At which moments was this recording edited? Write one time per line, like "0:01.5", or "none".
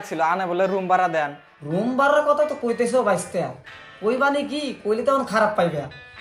0:01.4